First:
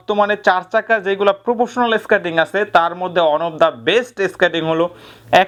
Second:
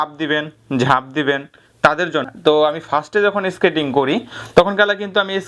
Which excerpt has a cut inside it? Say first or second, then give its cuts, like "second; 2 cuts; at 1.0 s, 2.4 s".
second; 1 cut; at 2.2 s